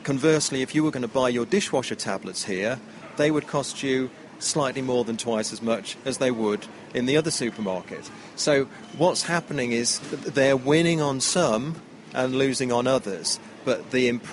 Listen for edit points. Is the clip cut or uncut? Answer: uncut